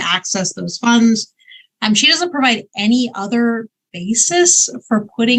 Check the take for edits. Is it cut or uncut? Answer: uncut